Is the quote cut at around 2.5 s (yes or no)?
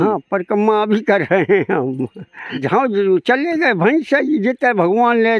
yes